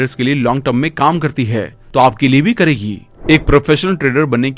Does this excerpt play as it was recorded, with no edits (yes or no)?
no